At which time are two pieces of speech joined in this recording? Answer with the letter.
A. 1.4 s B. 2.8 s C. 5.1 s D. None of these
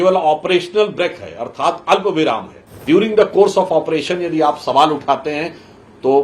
B